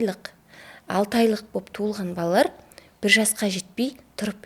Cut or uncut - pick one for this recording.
uncut